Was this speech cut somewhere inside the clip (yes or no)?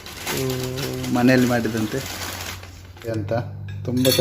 yes